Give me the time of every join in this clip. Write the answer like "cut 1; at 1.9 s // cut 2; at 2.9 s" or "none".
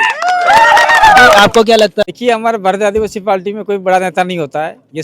cut 1; at 2.1 s